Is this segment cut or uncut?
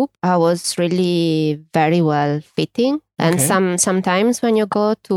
uncut